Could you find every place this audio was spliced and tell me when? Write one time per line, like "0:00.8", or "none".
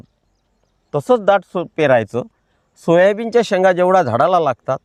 none